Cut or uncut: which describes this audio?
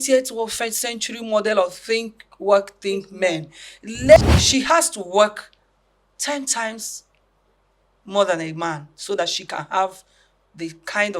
cut